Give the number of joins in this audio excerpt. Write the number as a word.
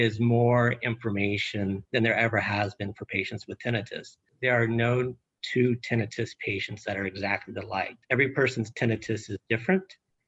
three